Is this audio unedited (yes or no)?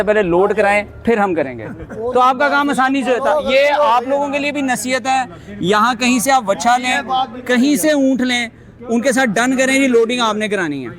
yes